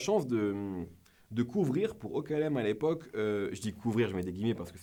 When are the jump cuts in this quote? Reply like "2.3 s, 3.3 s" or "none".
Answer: none